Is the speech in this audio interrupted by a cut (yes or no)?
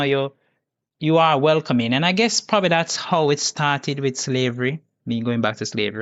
no